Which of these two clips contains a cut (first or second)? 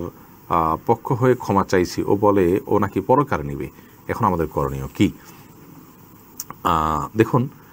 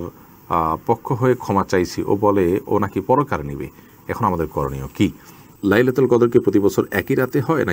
second